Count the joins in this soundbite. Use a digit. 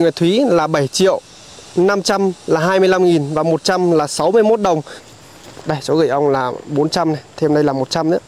1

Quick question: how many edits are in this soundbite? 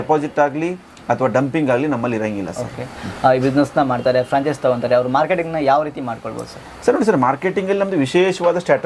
0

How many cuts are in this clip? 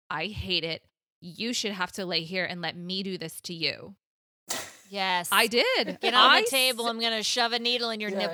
0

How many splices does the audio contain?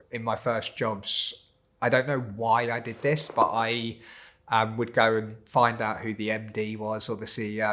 0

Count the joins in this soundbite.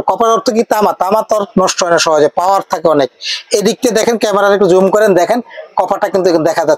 0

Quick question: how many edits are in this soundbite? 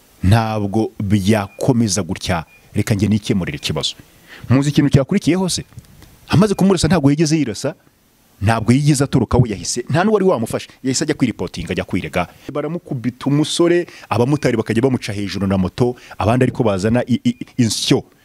1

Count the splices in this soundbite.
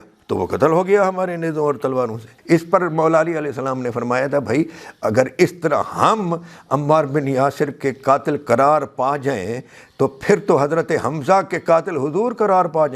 1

